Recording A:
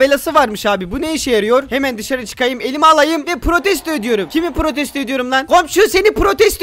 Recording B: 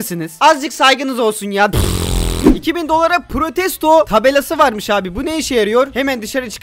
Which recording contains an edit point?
B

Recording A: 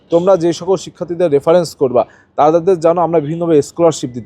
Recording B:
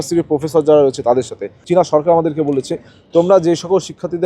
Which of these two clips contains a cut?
B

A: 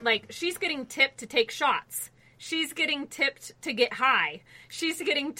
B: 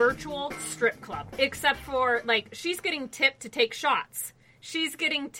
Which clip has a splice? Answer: B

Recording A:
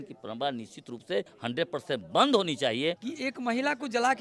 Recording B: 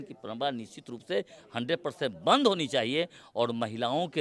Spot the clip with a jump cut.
A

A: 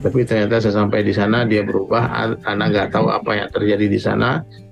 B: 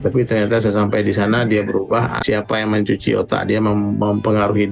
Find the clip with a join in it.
B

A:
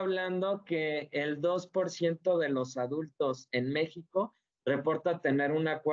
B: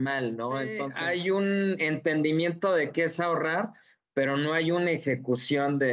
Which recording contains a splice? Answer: B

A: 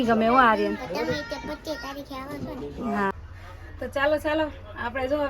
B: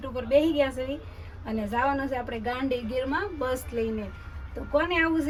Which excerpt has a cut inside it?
A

